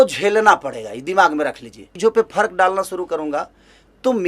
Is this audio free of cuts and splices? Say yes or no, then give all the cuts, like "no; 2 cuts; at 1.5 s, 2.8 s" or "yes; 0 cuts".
no; 1 cut; at 1.8 s